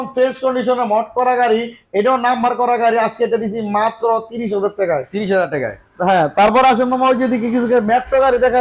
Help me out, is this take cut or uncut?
uncut